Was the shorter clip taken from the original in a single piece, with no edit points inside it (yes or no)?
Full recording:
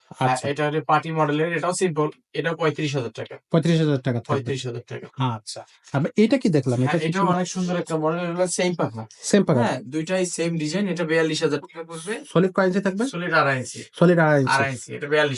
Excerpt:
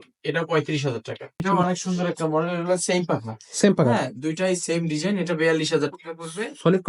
no